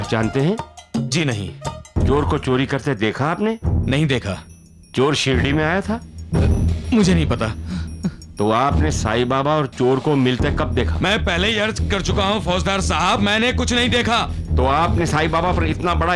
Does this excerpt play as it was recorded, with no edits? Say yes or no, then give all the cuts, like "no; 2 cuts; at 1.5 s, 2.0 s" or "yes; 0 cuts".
yes; 0 cuts